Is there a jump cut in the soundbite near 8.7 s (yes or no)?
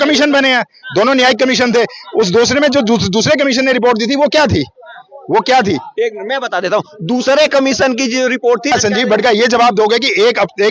yes